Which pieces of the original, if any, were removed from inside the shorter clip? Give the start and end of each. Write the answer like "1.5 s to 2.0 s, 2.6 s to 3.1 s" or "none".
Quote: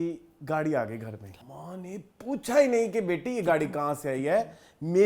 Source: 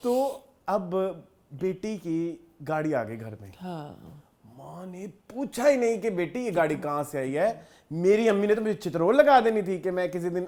3.5 s to 4.4 s

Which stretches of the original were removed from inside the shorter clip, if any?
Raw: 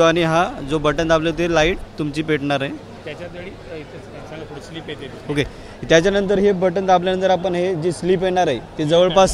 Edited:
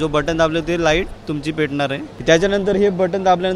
2.8 s to 5.7 s

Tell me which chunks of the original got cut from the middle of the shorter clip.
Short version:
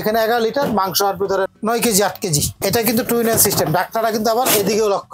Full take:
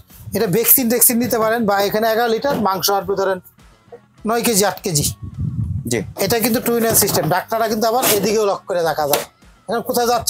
3.4 s to 4.2 s, 5.1 s to 6.1 s

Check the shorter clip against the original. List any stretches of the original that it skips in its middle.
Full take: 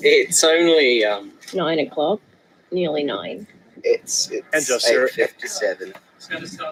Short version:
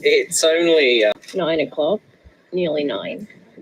1.2 s to 1.4 s

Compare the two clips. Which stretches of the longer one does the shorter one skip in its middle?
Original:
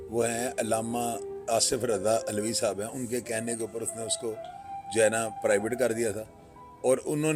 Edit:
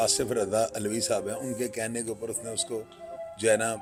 none

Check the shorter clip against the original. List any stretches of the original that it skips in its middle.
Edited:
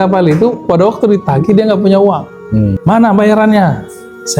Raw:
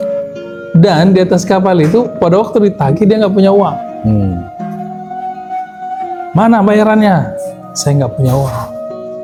4.3 s to 6.3 s

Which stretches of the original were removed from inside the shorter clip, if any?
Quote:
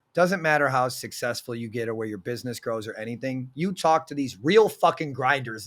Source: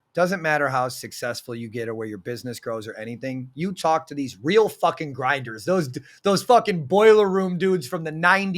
none

